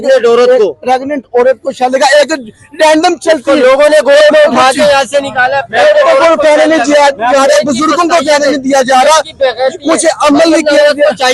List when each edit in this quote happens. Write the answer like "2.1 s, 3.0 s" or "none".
none